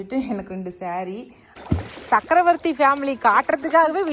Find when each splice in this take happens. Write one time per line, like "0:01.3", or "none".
0:01.4